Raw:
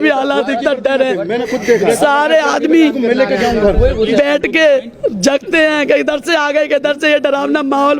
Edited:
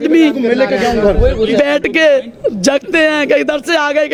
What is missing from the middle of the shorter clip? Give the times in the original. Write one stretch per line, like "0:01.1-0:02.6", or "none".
none